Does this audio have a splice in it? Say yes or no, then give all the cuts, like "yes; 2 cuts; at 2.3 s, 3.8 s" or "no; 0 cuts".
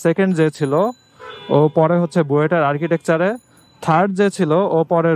no; 0 cuts